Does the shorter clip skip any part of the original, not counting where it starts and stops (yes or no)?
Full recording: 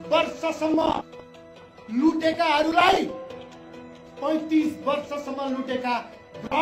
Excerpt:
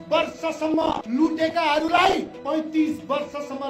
yes